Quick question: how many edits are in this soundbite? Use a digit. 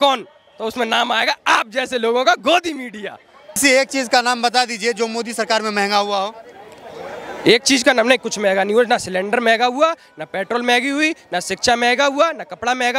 1